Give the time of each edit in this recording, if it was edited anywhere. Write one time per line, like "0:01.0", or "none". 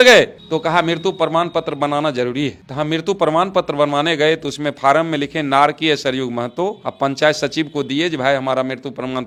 none

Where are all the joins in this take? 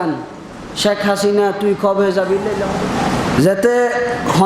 0:02.7

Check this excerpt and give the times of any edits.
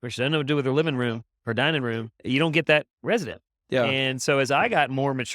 0:02.1

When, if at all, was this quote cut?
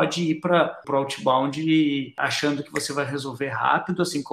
0:00.8
0:02.1

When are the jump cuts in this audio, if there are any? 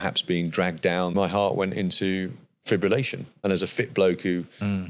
0:01.1
0:03.3

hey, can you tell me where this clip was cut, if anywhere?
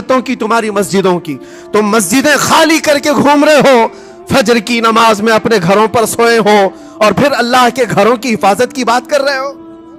none

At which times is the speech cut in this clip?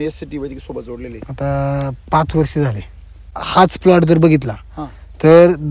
0:03.4

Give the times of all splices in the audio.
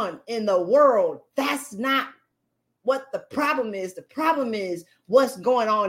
none

